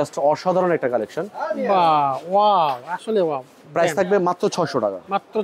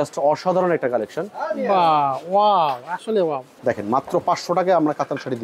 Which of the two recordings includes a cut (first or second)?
second